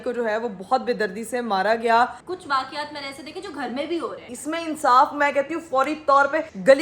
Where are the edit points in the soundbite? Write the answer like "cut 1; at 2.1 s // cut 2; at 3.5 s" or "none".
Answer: cut 1; at 2.2 s // cut 2; at 4.3 s